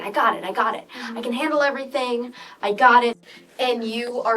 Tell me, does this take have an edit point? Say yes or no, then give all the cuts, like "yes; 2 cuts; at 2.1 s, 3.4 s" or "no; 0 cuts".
yes; 1 cut; at 3.2 s